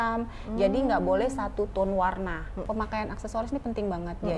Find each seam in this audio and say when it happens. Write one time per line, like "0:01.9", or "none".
0:02.6